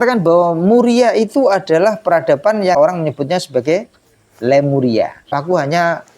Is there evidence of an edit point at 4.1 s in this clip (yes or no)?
no